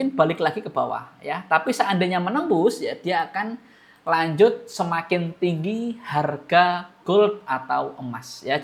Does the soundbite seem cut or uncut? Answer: uncut